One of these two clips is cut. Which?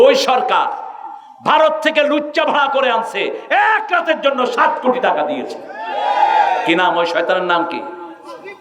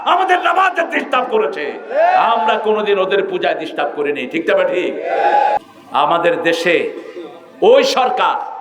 second; 1 cut; at 5.6 s

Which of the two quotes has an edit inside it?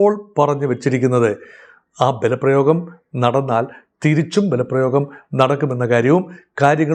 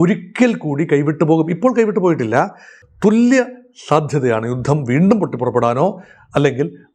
second; 1 cut; at 2.8 s

